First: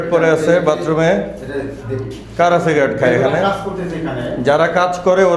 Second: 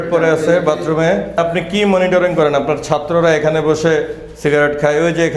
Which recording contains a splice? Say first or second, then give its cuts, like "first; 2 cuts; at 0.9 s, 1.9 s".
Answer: second; 1 cut; at 1.4 s